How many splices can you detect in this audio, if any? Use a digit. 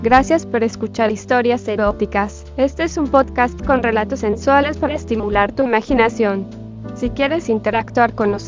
1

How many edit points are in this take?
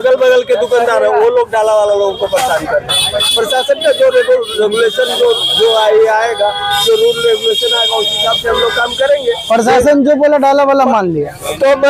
0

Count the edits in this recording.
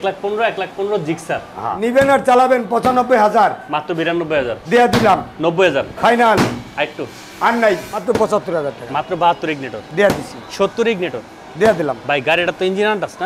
2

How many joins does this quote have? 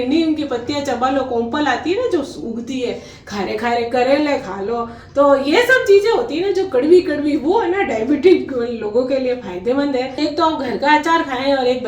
1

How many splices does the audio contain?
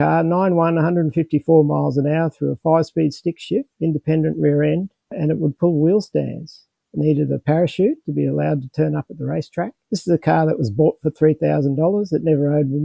2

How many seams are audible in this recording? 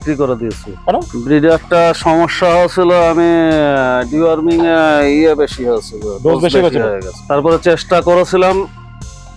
0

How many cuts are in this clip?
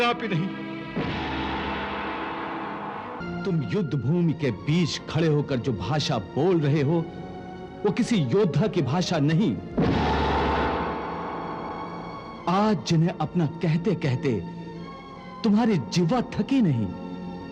1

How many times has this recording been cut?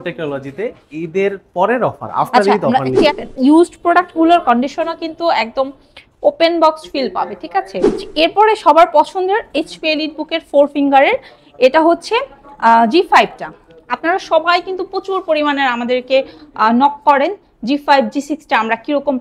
2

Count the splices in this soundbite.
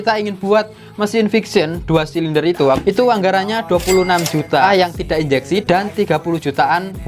1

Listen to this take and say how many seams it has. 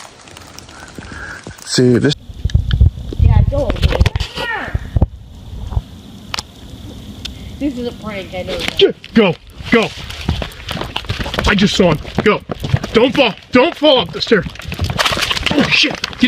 1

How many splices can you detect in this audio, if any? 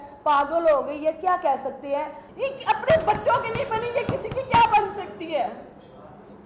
1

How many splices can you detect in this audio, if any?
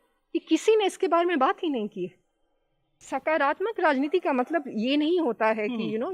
1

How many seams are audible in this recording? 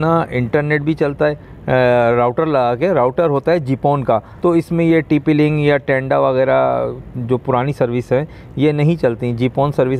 1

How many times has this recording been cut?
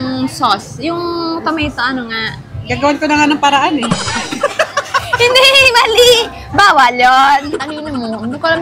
1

